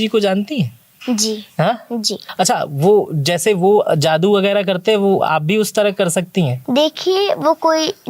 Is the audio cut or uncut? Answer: cut